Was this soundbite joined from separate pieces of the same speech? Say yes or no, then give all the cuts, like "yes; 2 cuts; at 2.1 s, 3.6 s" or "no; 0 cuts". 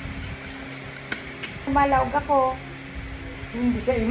yes; 1 cut; at 1.7 s